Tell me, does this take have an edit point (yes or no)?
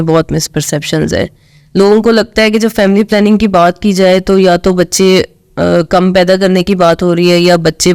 no